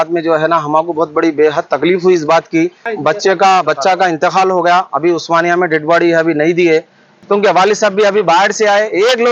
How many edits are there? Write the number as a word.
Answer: two